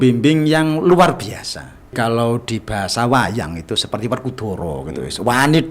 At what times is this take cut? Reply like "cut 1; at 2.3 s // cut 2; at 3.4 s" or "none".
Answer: cut 1; at 1.9 s